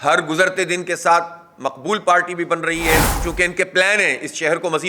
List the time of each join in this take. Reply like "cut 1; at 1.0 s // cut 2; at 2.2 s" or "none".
cut 1; at 3.2 s